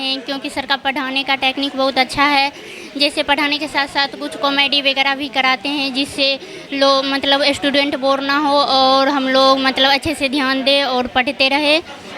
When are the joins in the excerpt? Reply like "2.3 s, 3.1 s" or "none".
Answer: none